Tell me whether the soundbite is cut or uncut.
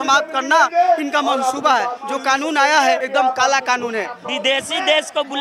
cut